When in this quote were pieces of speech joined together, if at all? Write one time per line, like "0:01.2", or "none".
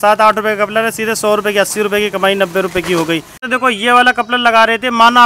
0:03.4